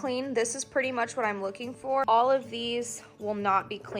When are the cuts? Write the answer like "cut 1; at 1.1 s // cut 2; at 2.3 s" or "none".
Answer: cut 1; at 2.0 s